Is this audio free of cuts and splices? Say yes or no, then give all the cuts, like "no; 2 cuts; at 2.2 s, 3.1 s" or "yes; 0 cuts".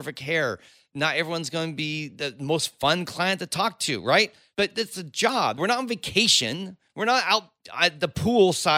no; 3 cuts; at 4.4 s, 5.6 s, 7.6 s